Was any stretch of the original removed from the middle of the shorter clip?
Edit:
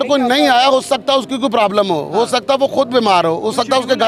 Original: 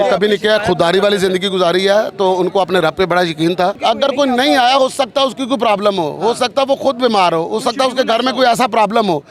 no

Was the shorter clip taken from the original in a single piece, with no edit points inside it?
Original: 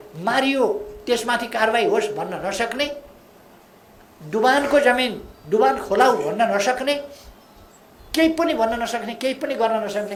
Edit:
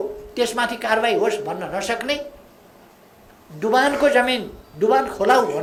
yes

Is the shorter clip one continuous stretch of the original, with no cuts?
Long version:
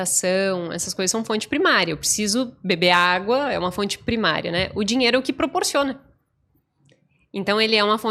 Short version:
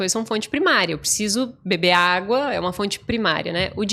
yes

